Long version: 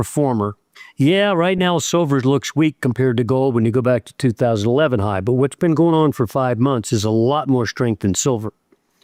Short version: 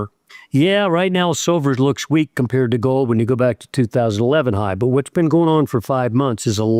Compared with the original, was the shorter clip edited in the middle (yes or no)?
no